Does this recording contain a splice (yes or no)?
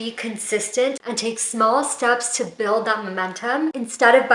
no